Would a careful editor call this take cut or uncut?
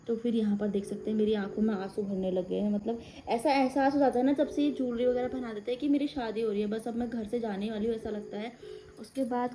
uncut